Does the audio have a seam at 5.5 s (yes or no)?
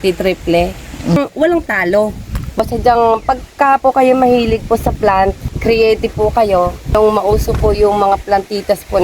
yes